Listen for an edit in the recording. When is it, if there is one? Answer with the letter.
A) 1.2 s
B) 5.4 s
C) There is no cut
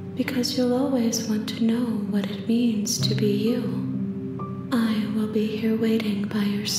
C